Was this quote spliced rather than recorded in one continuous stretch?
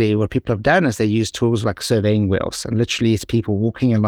no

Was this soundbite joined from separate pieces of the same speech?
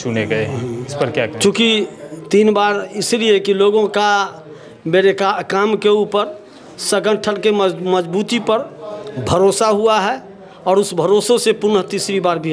no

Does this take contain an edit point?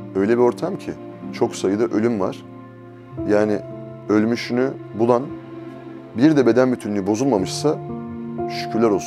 yes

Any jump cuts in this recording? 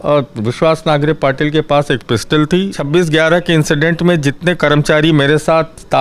yes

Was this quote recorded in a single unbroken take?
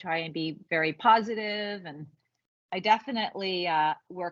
yes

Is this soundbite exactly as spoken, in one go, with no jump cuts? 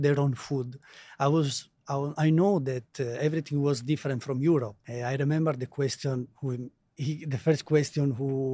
no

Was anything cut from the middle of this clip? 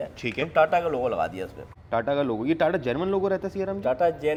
no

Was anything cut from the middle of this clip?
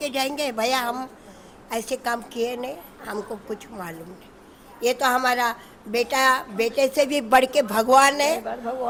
no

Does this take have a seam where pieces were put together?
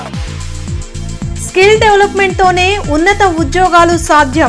yes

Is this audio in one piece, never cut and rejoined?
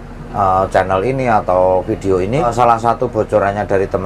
no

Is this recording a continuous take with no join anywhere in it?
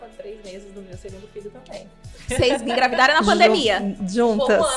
yes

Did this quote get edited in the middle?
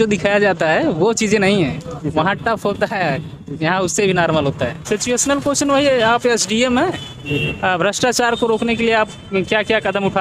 yes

